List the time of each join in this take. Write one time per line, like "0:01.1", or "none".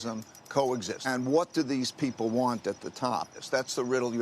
0:01.1
0:03.4